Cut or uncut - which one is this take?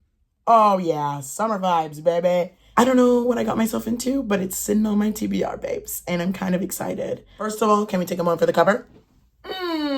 cut